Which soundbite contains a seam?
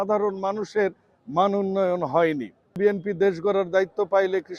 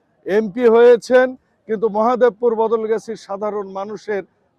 first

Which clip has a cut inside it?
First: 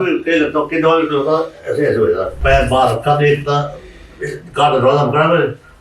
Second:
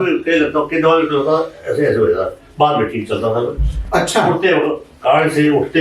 first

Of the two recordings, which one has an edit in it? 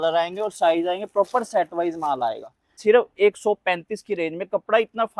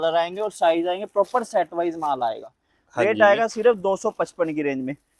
first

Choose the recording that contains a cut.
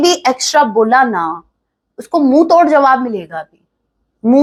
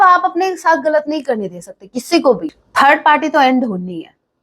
second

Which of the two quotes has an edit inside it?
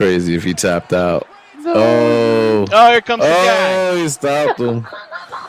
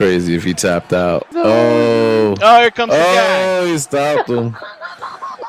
second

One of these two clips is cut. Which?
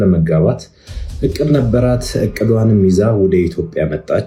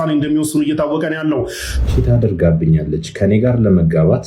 second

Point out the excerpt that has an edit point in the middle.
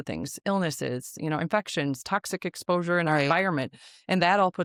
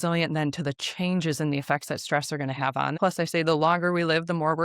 second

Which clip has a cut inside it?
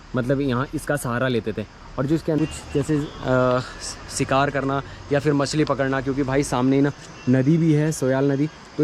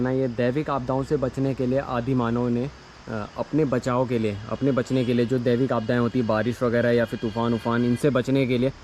first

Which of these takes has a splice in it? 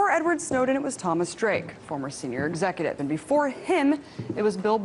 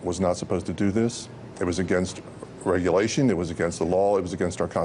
first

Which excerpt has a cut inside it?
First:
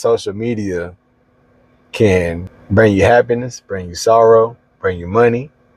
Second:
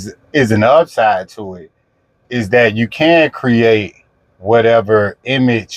first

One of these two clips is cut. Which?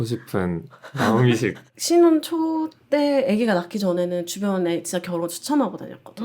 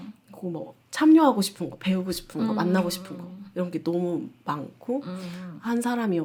first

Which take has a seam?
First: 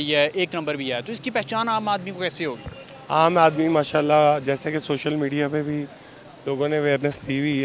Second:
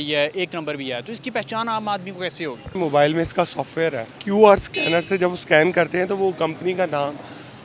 second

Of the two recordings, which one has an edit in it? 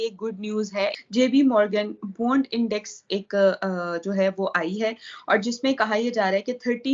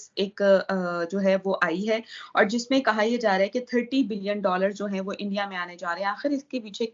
first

